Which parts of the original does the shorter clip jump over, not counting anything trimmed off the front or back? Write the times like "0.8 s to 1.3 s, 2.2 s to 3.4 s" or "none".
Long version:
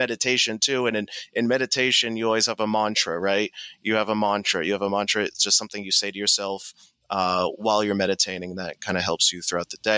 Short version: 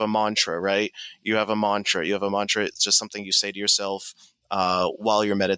none